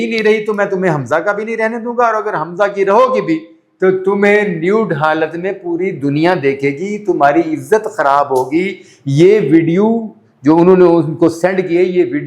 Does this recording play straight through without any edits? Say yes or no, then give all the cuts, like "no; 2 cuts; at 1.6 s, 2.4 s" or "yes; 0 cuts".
yes; 0 cuts